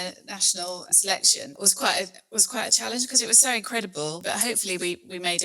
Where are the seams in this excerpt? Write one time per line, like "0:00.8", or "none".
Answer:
0:01.5
0:04.2

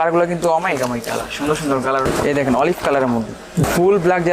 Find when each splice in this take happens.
0:02.0
0:03.6

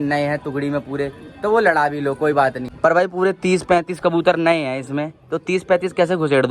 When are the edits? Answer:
0:02.7

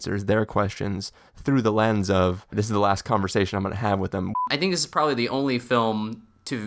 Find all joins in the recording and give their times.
0:02.5
0:04.3

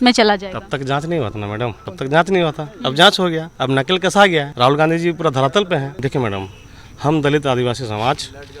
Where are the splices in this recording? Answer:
0:01.8
0:03.5
0:04.5
0:05.9

